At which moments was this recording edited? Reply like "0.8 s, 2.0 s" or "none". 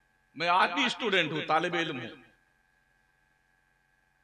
none